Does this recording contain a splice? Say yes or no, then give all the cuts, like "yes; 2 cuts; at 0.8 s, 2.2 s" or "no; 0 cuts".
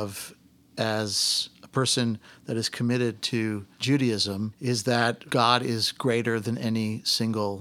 yes; 3 cuts; at 3.7 s, 4.6 s, 5.2 s